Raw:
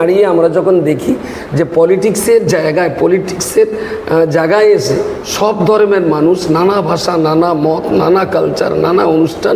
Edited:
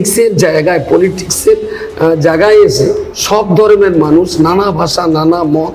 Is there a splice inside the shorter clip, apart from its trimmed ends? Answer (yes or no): no